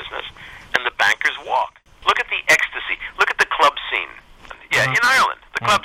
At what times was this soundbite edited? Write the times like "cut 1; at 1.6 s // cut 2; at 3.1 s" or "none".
cut 1; at 1.8 s // cut 2; at 4.4 s